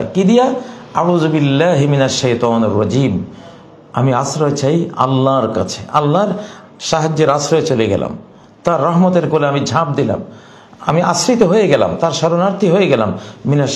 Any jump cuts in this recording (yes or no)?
no